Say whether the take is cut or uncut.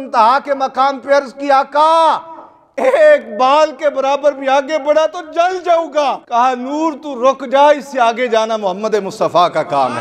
cut